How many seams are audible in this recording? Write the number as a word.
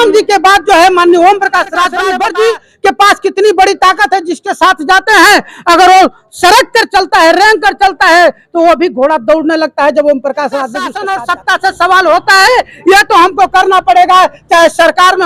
two